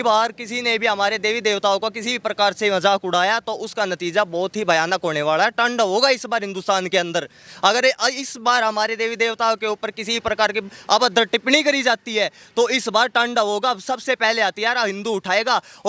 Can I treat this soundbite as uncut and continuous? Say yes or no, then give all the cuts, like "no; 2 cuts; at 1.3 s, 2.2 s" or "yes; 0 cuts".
yes; 0 cuts